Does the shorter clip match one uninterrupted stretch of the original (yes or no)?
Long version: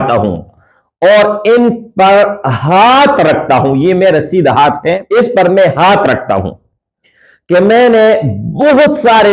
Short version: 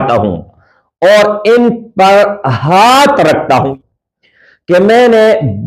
no